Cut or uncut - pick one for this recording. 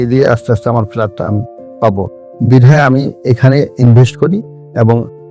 uncut